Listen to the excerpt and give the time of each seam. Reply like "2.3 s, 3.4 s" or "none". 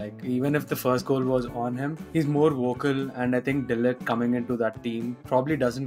none

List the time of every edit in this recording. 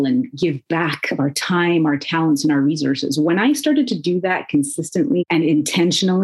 5.2 s

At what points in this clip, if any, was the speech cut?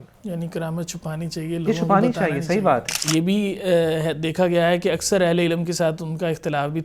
2.9 s

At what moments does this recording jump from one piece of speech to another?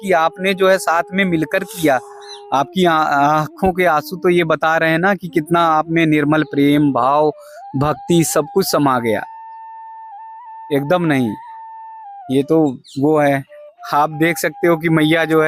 none

